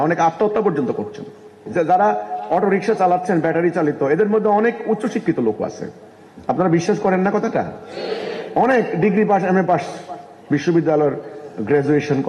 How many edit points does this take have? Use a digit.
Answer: 1